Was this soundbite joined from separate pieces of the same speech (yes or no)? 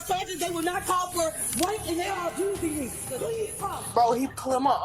yes